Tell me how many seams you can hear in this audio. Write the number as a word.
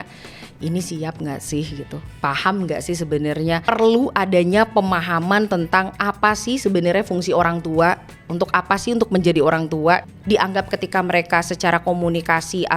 two